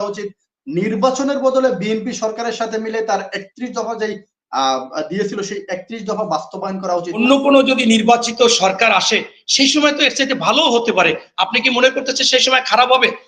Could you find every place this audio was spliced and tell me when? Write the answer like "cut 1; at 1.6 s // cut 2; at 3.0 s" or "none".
cut 1; at 7.2 s